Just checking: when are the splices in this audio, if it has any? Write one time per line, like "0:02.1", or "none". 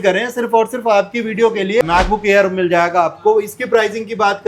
0:01.8